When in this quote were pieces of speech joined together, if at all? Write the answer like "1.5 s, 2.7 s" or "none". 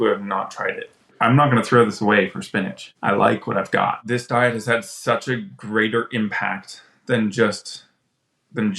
1.2 s, 2.8 s, 4.0 s